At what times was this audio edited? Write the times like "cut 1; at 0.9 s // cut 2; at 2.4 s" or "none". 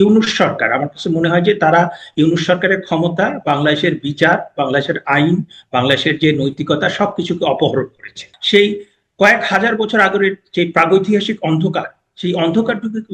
cut 1; at 8.3 s

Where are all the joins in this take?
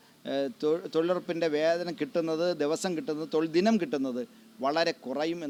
none

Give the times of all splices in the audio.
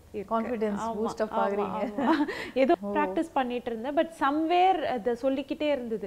cut 1; at 2.7 s

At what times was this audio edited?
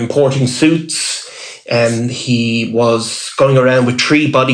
none

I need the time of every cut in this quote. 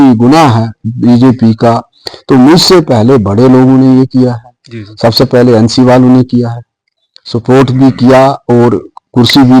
none

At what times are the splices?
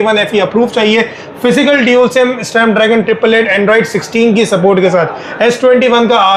none

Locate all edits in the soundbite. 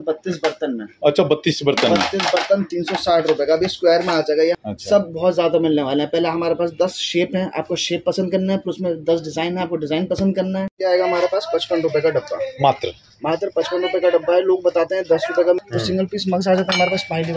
cut 1; at 4.6 s // cut 2; at 10.7 s // cut 3; at 15.6 s

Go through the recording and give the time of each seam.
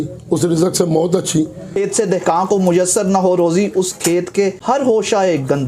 cut 1; at 1.7 s // cut 2; at 4.6 s

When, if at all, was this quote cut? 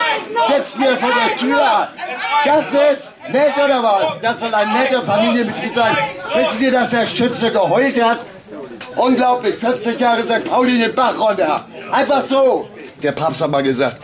cut 1; at 12.9 s

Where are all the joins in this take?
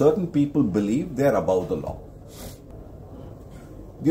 cut 1; at 2.7 s

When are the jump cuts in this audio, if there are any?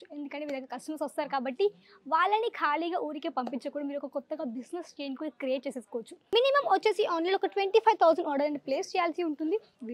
cut 1; at 6.2 s

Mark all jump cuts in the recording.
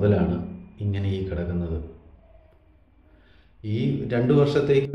none

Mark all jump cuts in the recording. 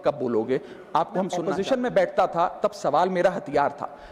cut 1; at 1.5 s

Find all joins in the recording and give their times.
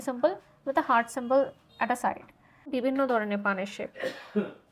cut 1; at 2.6 s

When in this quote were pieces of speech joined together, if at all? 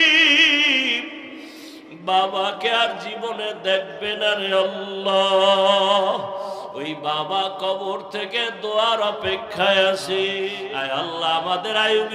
cut 1; at 10.5 s

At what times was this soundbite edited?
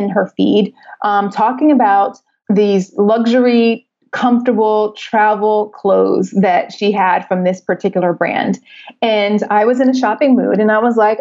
cut 1; at 2.3 s

